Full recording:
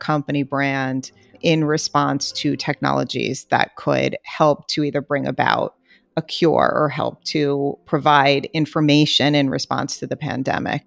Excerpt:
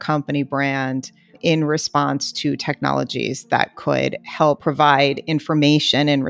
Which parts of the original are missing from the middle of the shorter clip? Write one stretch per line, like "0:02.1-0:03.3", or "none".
0:04.6-0:07.9